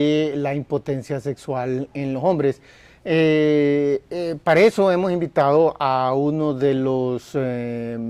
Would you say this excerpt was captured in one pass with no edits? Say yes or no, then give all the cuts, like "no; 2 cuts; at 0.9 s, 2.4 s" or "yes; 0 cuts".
yes; 0 cuts